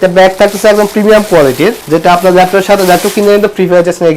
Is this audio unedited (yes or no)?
no